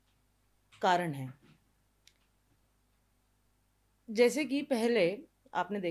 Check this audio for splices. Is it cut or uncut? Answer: uncut